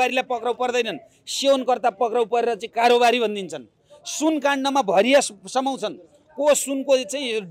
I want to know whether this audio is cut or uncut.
uncut